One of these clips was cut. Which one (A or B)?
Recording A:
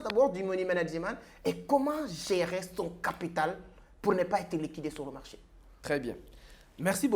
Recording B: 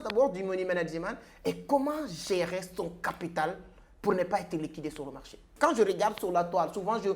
B